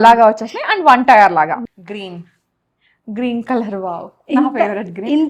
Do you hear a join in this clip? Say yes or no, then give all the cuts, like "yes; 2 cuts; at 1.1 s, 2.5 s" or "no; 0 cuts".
yes; 1 cut; at 1.6 s